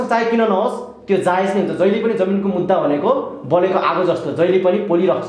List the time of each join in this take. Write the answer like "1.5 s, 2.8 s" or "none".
none